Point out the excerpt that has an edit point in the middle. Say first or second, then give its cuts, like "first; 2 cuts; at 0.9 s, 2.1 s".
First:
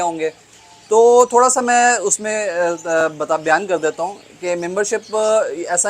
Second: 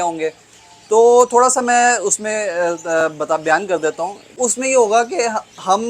second; 1 cut; at 4.4 s